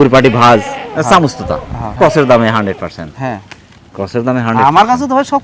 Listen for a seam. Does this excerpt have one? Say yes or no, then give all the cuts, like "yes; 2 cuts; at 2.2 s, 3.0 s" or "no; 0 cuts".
yes; 1 cut; at 1.9 s